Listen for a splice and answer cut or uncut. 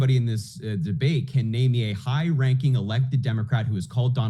uncut